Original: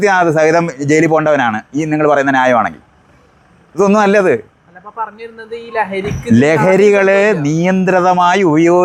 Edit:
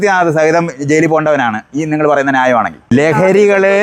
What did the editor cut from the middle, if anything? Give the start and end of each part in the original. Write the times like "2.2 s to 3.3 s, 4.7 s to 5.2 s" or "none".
2.9 s to 6.4 s